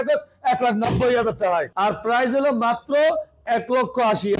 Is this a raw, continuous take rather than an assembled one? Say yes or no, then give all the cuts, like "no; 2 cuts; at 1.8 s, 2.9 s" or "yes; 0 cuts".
no; 1 cut; at 1.7 s